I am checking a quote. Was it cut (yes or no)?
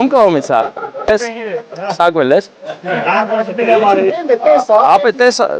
yes